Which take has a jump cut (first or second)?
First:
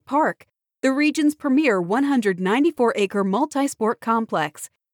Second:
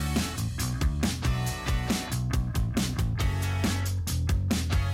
second